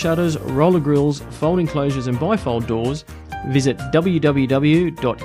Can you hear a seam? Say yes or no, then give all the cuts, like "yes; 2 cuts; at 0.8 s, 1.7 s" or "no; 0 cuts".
no; 0 cuts